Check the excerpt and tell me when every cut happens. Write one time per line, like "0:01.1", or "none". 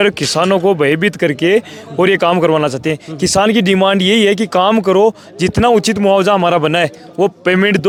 none